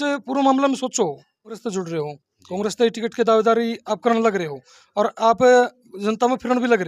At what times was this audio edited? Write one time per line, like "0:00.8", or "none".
0:01.6